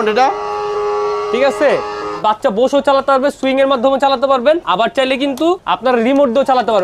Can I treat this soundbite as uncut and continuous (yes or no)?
no